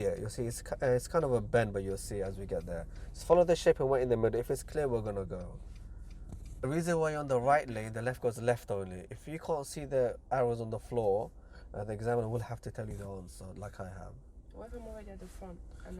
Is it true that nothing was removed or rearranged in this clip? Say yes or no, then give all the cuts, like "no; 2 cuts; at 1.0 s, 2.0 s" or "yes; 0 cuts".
no; 1 cut; at 6.6 s